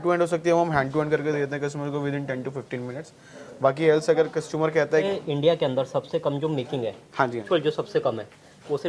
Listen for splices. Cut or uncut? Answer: cut